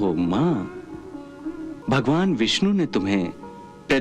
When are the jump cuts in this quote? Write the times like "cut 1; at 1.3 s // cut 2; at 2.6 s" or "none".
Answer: cut 1; at 1.7 s